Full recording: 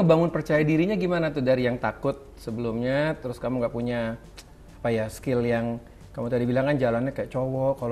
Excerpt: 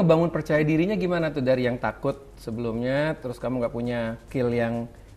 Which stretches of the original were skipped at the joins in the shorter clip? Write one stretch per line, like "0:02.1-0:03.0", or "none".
0:04.2-0:05.2